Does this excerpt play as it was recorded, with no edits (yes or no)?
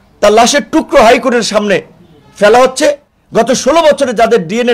no